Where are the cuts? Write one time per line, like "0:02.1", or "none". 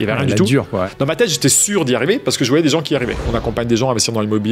0:00.9
0:03.2

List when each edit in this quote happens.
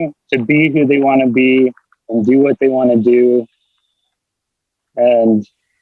none

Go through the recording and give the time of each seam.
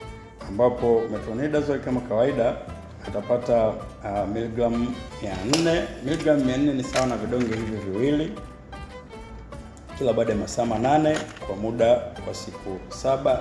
none

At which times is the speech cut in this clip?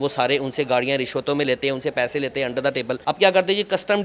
0:02.9

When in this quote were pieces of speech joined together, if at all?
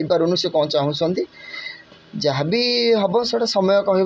none

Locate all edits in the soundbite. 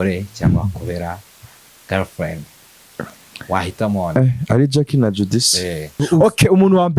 0:06.0

